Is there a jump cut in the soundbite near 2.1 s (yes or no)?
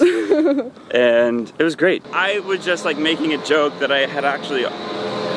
yes